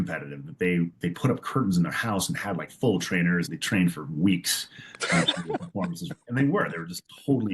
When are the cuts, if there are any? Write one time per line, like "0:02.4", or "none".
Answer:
0:03.6

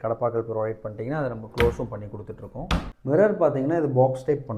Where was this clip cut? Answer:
0:02.9

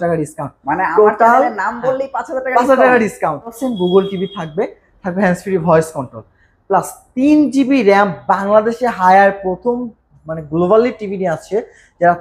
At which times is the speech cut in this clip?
0:03.6

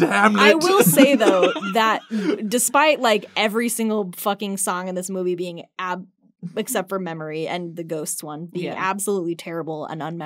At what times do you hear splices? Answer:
none

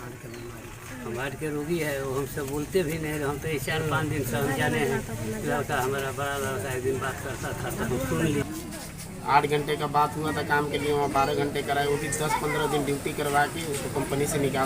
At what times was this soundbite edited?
0:08.4

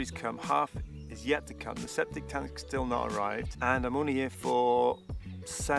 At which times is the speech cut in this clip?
none

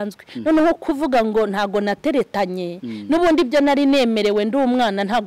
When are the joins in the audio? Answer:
none

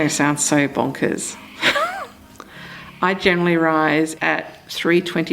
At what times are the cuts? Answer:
0:04.2

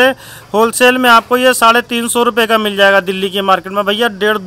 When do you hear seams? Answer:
none

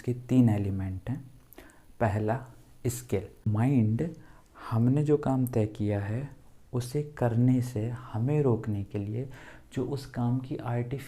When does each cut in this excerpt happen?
0:03.5

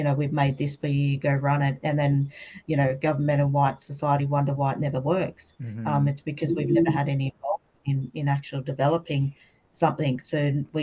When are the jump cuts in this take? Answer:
none

